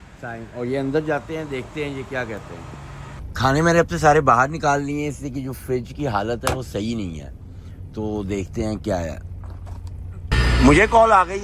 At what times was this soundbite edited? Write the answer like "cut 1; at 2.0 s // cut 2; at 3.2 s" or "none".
cut 1; at 3.0 s // cut 2; at 10.1 s